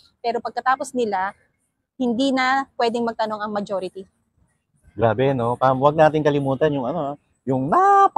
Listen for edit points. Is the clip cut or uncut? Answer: uncut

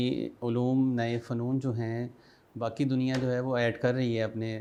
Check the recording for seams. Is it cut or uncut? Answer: uncut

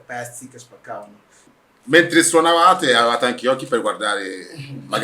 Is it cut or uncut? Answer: cut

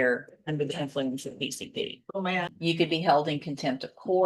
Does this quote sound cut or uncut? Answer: cut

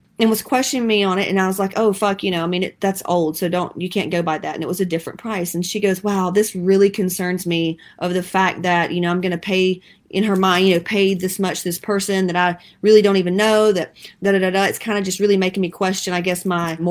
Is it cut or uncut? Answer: uncut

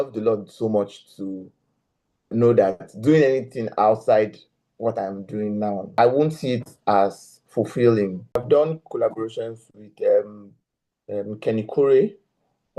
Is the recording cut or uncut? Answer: cut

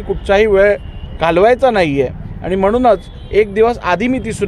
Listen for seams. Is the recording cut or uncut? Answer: uncut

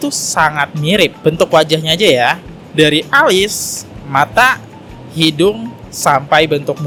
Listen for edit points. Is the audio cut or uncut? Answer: uncut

